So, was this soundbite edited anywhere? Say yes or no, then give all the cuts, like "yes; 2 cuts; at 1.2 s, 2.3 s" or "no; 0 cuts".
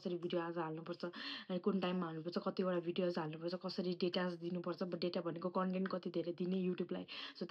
no; 0 cuts